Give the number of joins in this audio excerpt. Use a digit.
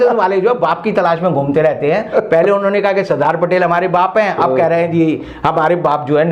0